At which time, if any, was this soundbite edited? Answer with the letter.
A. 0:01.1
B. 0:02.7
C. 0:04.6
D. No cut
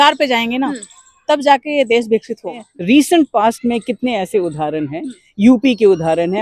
B